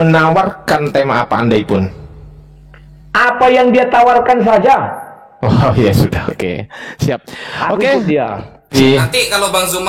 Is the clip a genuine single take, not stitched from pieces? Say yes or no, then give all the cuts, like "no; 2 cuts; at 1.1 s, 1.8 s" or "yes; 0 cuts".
no; 1 cut; at 8.7 s